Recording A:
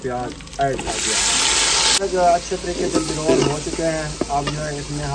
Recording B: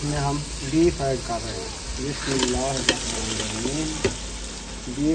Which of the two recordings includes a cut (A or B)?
A